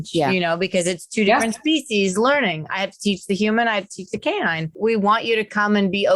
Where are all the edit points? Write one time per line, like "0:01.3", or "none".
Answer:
0:04.7